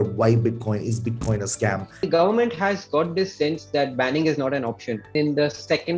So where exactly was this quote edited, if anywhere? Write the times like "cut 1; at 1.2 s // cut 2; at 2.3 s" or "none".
cut 1; at 2.0 s // cut 2; at 5.1 s